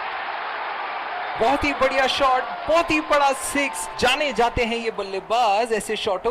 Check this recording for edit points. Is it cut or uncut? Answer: cut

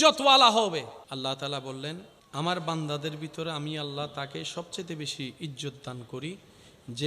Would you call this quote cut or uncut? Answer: cut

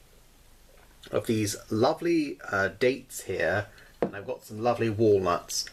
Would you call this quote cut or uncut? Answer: uncut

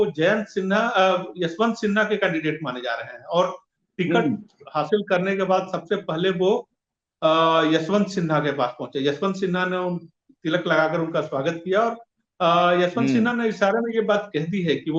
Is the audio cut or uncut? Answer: uncut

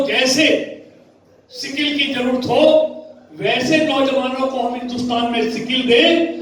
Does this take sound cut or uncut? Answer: uncut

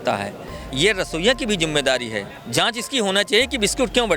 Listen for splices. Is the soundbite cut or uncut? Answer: cut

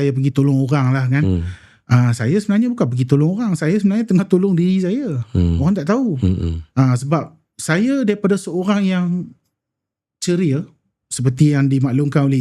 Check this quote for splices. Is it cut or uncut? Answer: uncut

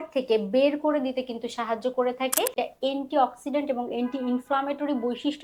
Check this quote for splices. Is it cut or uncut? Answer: cut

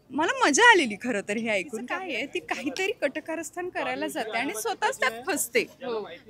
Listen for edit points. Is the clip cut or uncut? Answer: cut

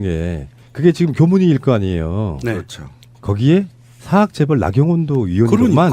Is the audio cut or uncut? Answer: uncut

